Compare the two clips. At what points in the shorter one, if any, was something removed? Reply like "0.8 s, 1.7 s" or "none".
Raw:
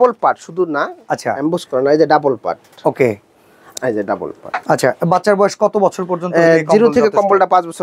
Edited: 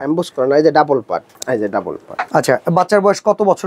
1.3 s